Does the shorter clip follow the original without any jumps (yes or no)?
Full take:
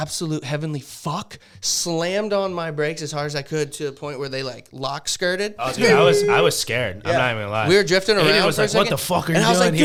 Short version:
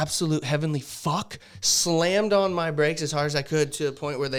yes